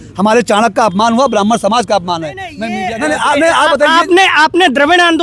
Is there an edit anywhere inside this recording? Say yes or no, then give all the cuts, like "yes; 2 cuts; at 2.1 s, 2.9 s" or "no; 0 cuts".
yes; 1 cut; at 2.7 s